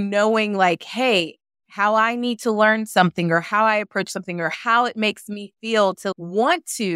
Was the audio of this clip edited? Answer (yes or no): yes